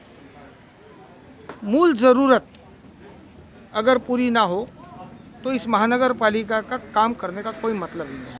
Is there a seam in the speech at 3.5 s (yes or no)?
no